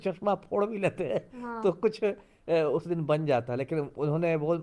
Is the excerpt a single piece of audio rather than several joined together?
yes; 0 cuts

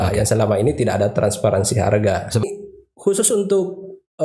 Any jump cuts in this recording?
yes; 1 cut; at 2.4 s

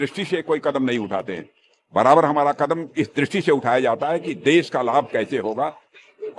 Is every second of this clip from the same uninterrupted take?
yes; 0 cuts

